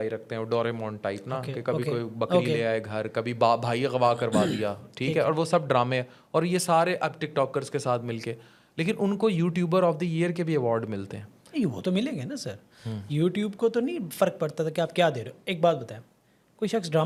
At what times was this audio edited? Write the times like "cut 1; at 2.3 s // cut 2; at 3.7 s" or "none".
none